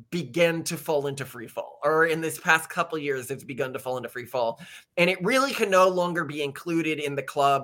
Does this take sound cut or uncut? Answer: uncut